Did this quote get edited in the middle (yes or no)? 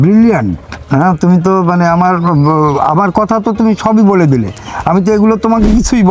no